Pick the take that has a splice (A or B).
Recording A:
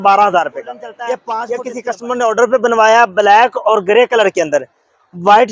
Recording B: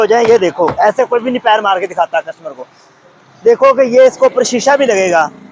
A